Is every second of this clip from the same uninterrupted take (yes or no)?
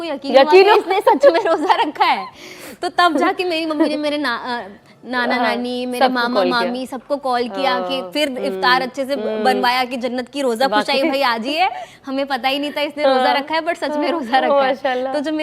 yes